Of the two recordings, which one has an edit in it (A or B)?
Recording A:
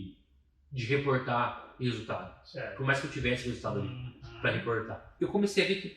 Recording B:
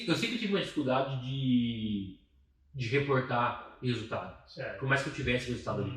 A